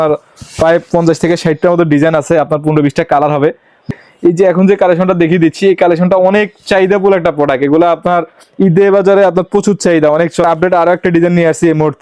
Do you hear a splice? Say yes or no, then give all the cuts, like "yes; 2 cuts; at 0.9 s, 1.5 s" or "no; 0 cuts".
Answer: yes; 2 cuts; at 3.9 s, 10.4 s